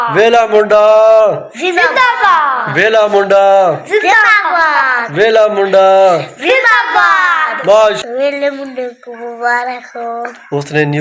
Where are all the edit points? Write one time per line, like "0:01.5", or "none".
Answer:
0:08.0